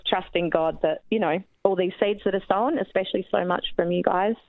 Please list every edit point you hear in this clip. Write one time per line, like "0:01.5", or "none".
none